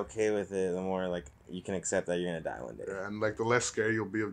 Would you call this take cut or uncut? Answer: uncut